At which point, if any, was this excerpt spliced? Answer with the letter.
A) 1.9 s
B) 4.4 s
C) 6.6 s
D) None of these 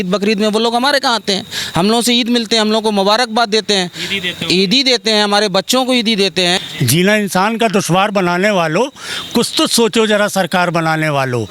C